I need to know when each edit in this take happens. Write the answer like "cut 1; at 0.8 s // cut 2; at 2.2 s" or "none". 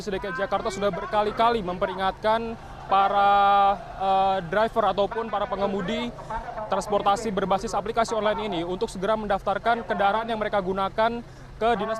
none

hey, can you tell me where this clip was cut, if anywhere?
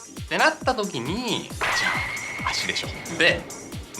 cut 1; at 1.8 s

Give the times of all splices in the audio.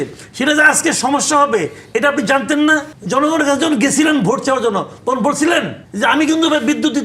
cut 1; at 3.0 s // cut 2; at 5.8 s

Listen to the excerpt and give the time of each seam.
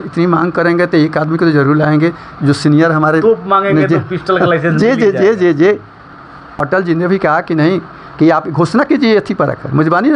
none

